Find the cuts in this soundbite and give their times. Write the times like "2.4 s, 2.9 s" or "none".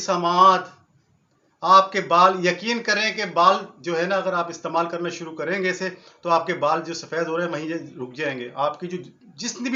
none